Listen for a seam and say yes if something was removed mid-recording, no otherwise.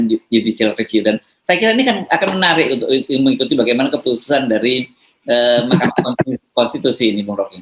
no